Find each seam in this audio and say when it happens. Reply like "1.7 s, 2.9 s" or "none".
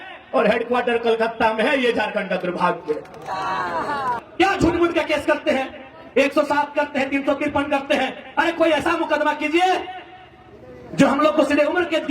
4.2 s